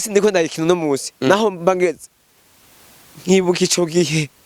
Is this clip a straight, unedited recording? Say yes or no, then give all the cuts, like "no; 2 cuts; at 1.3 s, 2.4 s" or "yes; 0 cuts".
yes; 0 cuts